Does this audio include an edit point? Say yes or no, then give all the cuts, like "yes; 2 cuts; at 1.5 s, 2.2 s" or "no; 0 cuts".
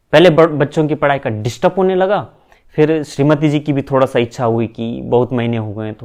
no; 0 cuts